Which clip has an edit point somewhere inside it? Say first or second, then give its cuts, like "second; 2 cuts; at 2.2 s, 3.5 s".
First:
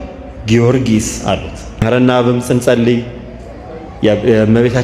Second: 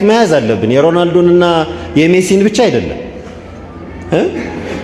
first; 1 cut; at 1.8 s